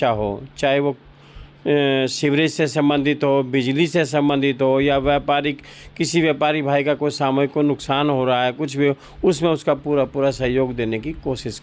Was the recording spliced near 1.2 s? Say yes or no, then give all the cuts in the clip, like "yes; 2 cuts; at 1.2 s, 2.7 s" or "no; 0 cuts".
no; 0 cuts